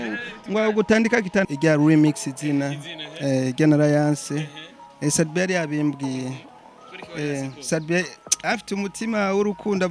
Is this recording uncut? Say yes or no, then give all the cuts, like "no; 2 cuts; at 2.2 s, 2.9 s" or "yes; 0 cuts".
no; 1 cut; at 1.5 s